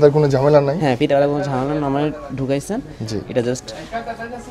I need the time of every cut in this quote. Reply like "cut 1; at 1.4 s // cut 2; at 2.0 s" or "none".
none